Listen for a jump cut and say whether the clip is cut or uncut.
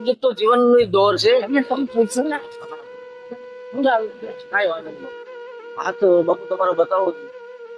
cut